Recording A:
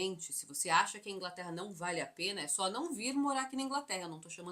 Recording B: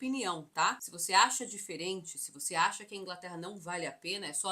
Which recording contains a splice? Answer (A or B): B